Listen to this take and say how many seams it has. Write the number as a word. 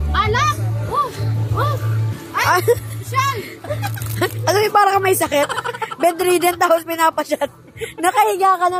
zero